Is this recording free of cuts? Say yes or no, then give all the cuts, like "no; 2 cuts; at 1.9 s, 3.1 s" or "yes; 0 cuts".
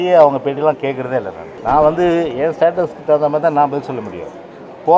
no; 1 cut; at 1.5 s